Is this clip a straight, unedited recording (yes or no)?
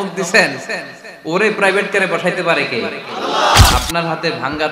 no